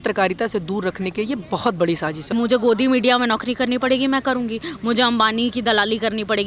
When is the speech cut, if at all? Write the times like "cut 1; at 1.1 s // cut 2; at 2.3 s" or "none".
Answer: cut 1; at 2.3 s